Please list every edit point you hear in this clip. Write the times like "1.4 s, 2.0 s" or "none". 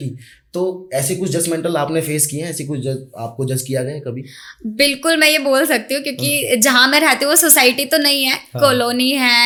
none